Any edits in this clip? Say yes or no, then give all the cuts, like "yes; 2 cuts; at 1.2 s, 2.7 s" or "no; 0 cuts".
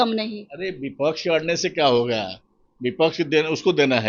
no; 0 cuts